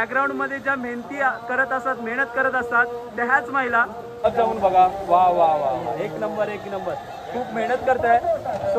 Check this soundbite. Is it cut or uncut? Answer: cut